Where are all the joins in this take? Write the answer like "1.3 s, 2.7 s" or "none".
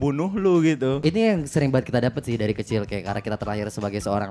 1.0 s